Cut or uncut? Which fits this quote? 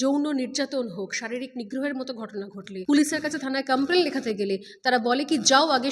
cut